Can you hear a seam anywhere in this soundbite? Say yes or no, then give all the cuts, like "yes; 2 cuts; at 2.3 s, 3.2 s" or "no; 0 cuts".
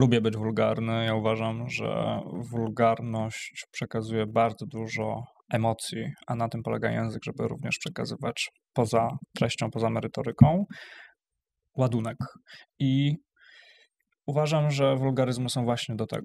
no; 0 cuts